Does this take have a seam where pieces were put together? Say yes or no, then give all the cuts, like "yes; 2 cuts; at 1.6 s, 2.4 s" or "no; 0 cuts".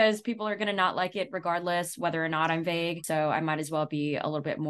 yes; 1 cut; at 3.0 s